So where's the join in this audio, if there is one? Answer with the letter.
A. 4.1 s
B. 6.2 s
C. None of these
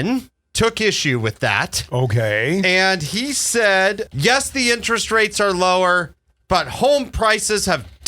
A